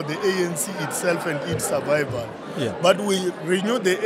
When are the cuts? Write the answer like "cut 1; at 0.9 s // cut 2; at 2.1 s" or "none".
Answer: none